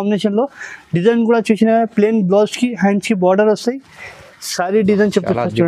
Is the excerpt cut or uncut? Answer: uncut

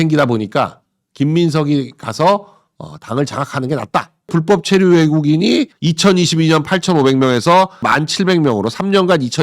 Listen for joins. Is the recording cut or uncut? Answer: cut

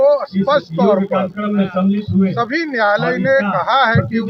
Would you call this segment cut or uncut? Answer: uncut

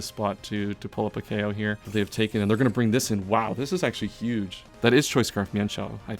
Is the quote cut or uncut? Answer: cut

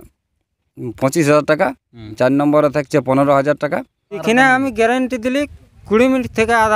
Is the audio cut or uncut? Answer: cut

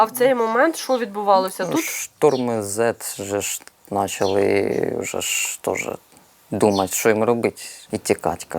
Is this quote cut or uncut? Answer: cut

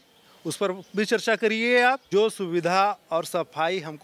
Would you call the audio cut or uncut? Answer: cut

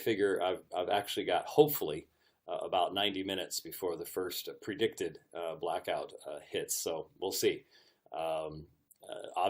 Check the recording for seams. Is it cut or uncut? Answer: uncut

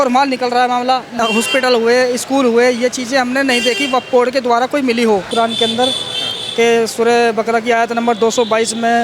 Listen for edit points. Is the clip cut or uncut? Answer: cut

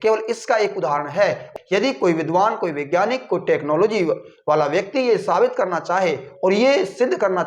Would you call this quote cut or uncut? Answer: cut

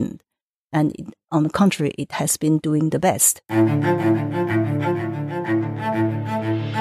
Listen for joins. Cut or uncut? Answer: cut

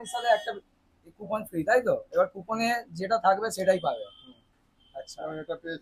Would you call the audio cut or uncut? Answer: uncut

